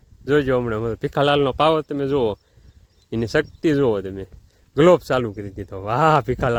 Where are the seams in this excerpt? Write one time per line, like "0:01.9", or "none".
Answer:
none